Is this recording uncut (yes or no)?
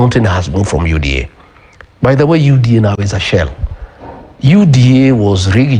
yes